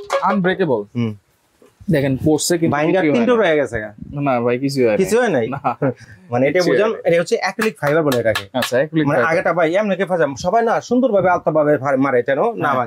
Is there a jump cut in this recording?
no; 0 cuts

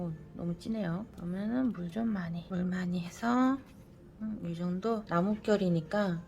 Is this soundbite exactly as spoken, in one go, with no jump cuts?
no; 3 cuts; at 1.1 s, 2.4 s, 5.0 s

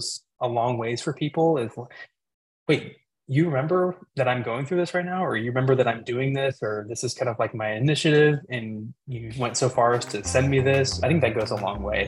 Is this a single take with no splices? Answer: no; 1 cut; at 11.0 s

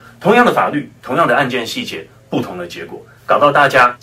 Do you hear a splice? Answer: no; 0 cuts

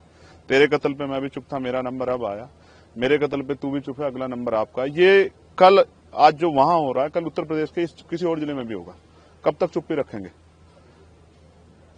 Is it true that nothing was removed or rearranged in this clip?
yes; 0 cuts

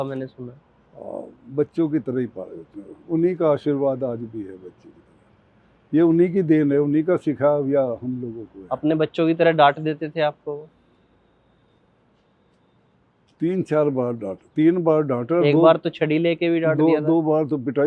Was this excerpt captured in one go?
yes; 0 cuts

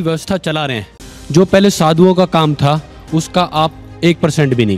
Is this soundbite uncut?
no; 1 cut; at 1.1 s

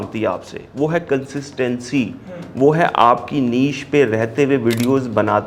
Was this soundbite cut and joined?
no; 0 cuts

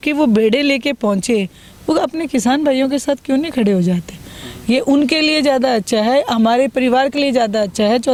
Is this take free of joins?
yes; 0 cuts

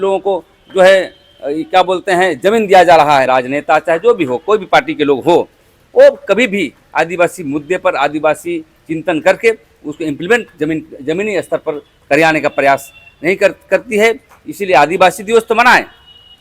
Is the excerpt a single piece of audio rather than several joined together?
no; 1 cut; at 3.3 s

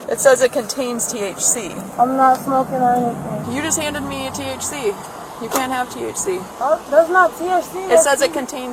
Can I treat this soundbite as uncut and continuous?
no; 2 cuts; at 3.4 s, 6.5 s

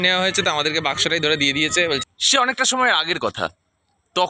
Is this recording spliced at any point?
yes; 1 cut; at 2.1 s

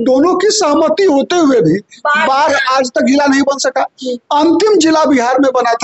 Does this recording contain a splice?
no; 0 cuts

